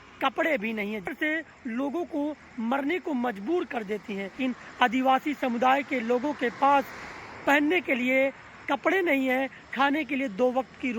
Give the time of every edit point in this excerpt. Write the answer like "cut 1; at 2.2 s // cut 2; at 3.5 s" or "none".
cut 1; at 1.1 s // cut 2; at 4.4 s